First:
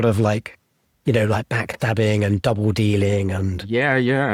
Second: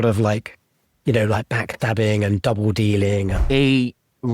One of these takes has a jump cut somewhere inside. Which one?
second; 1 cut; at 3.4 s

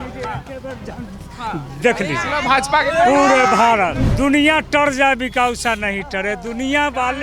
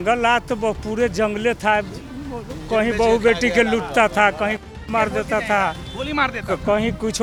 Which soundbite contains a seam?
first; 1 cut; at 4.0 s

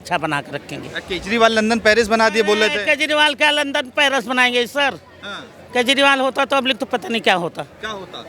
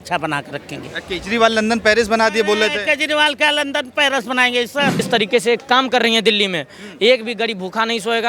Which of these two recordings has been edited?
second; 1 cut; at 5.0 s

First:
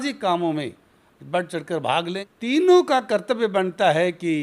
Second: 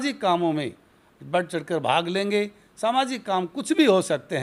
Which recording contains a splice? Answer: first; 1 cut; at 2.2 s

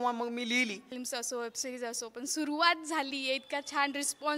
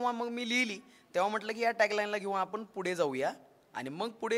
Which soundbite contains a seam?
first; 1 cut; at 0.9 s

